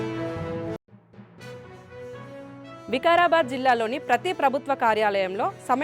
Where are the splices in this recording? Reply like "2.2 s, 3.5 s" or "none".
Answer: 2.8 s